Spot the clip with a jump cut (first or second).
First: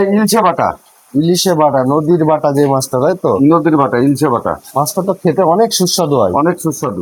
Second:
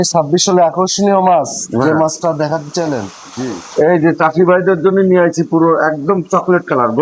second